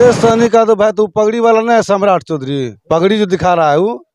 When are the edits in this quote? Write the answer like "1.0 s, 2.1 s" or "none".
2.7 s